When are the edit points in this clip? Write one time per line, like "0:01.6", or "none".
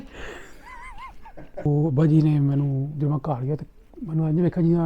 0:01.7